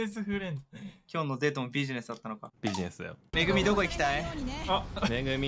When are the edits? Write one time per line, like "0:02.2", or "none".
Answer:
0:03.2